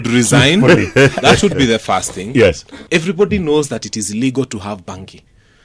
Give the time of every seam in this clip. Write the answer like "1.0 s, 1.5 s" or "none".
2.7 s